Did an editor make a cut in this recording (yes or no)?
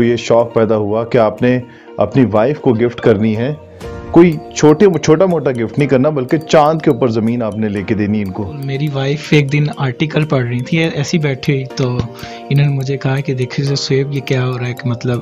yes